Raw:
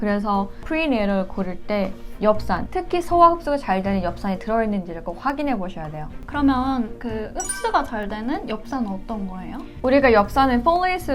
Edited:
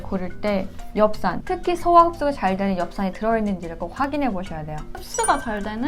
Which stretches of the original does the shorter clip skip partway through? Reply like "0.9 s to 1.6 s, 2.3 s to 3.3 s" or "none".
6.2 s to 7.4 s